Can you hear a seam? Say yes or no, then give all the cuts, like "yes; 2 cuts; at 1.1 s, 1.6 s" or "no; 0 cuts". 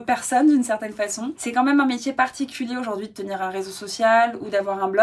yes; 1 cut; at 1.3 s